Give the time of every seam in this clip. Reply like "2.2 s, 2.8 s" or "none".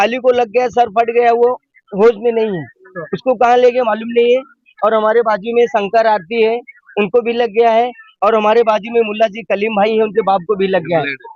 none